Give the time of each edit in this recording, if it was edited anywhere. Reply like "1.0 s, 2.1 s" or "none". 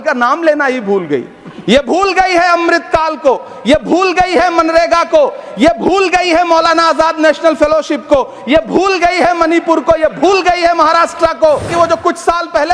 11.7 s